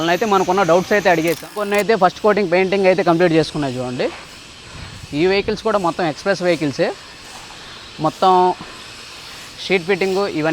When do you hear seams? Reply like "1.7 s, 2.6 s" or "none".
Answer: 1.6 s